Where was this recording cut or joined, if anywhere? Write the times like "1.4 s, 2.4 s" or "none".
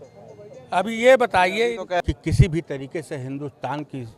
2.0 s